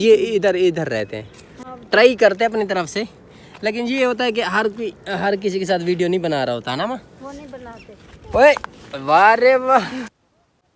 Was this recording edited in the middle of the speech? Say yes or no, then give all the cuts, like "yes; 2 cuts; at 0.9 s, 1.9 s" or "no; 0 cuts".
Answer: no; 0 cuts